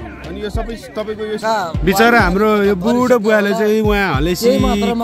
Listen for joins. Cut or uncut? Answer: cut